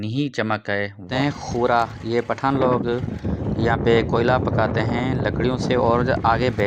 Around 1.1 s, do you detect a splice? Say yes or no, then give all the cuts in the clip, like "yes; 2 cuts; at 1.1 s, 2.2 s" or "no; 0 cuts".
yes; 1 cut; at 1.1 s